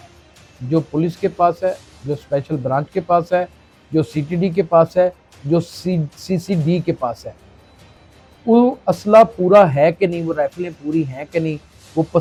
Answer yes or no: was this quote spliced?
no